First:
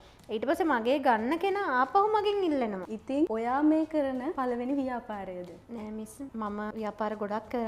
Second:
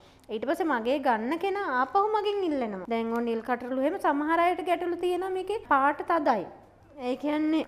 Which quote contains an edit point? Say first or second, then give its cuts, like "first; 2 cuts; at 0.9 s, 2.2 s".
first; 2 cuts; at 2.8 s, 6.3 s